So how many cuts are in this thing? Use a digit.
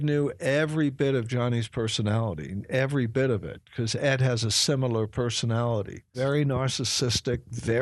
1